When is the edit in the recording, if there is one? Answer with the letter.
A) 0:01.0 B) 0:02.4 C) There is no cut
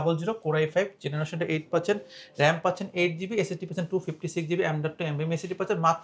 C